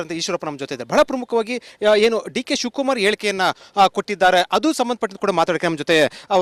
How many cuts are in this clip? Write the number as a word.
zero